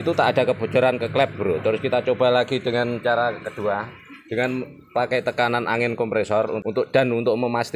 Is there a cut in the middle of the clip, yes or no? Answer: yes